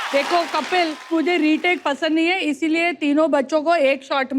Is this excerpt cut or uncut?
cut